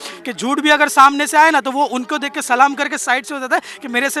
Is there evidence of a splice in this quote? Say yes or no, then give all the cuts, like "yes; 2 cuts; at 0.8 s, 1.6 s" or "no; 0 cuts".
no; 0 cuts